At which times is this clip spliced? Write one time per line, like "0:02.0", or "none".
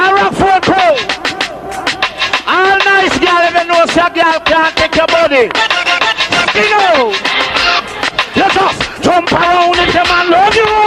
none